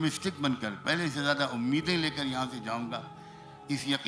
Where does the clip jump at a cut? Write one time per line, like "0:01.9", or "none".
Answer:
none